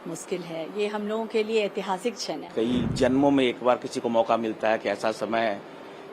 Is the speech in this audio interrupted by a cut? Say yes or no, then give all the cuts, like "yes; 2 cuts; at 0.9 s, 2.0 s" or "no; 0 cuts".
yes; 1 cut; at 2.5 s